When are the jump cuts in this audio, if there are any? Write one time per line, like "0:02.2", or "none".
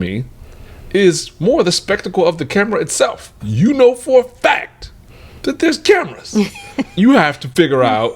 0:03.4
0:06.9

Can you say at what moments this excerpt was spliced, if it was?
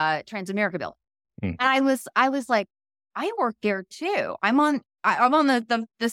none

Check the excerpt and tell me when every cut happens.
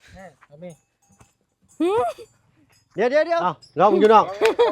0:03.4

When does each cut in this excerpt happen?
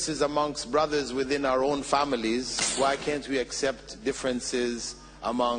0:02.6

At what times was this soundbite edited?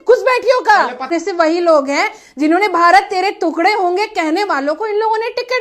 0:01.1

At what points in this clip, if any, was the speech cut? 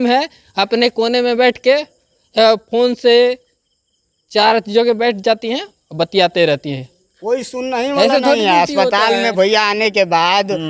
none

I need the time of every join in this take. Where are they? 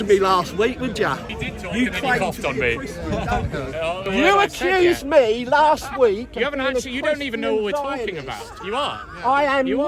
0:01.3
0:04.1

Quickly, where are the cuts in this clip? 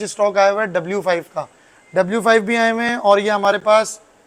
none

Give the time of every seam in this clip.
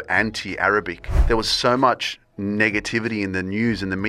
0:01.1

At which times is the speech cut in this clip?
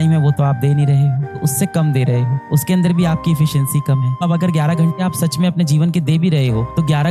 0:01.4
0:04.2

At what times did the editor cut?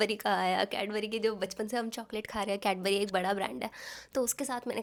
none

